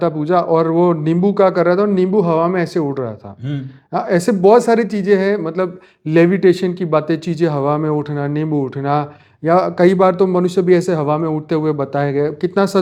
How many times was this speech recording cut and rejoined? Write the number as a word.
zero